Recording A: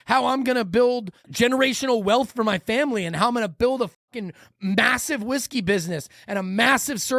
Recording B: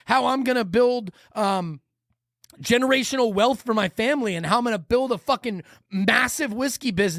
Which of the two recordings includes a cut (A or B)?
A